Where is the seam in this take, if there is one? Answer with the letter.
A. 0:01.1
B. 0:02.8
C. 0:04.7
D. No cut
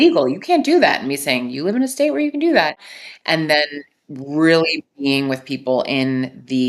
B